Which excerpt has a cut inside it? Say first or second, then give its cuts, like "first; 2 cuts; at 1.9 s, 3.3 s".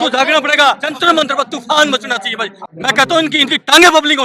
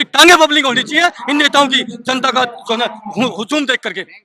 first; 2 cuts; at 0.8 s, 2.6 s